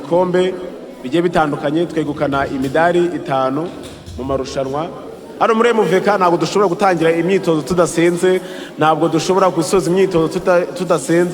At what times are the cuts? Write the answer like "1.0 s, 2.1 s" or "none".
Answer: 5.2 s